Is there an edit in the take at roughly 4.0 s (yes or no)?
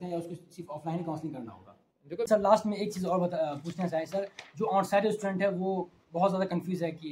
no